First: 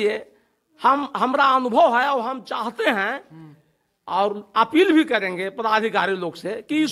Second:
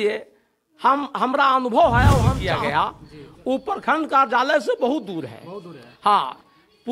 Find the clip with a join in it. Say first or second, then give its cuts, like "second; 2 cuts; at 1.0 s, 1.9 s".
second; 1 cut; at 2.5 s